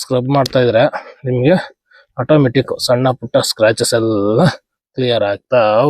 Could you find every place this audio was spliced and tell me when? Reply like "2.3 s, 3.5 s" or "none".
none